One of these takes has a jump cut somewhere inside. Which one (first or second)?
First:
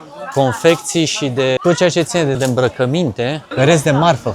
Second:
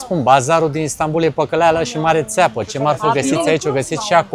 first